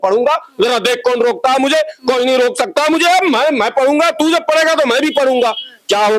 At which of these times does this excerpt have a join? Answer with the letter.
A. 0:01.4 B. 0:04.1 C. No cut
C